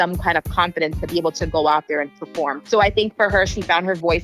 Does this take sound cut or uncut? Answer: cut